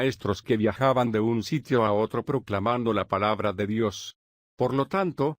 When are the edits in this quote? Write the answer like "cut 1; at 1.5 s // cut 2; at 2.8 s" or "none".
cut 1; at 1.9 s

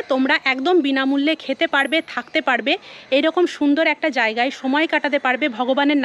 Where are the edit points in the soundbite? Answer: none

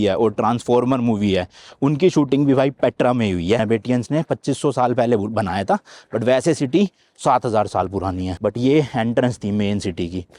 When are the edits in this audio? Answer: cut 1; at 3.6 s // cut 2; at 8.3 s

